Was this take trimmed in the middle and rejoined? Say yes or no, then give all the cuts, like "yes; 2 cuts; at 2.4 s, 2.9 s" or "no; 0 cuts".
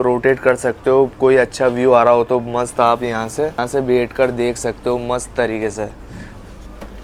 no; 0 cuts